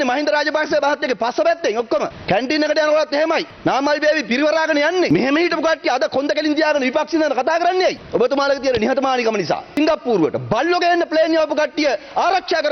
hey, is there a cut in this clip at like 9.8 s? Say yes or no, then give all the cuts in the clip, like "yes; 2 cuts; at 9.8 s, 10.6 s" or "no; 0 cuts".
yes; 5 cuts; at 2.2 s, 3.5 s, 5.1 s, 8.0 s, 9.8 s